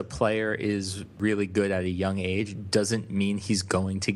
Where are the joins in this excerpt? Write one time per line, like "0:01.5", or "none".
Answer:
0:01.1